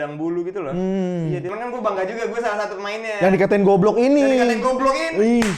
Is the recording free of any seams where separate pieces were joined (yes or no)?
no